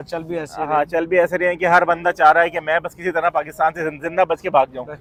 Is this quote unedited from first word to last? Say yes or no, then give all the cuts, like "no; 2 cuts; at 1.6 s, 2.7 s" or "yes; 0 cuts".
yes; 0 cuts